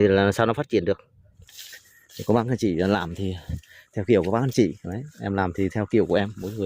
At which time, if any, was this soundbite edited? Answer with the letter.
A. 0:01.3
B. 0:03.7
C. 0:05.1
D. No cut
A